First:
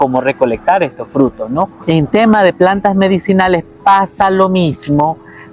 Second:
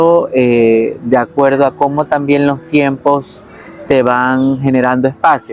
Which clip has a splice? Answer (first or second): first